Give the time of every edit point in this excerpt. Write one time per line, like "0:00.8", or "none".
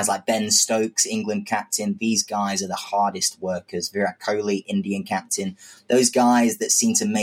none